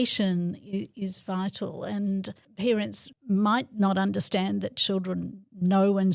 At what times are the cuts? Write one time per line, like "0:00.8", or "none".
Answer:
0:02.4
0:03.1